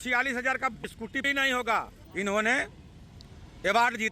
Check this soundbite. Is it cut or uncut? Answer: cut